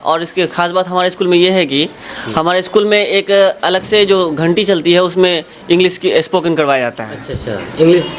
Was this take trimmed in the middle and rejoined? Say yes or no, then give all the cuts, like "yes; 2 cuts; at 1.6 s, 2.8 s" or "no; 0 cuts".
no; 0 cuts